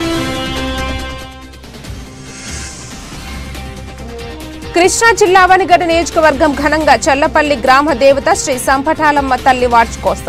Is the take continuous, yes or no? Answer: yes